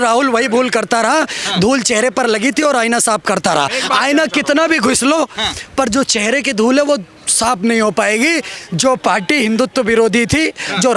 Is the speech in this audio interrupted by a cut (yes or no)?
no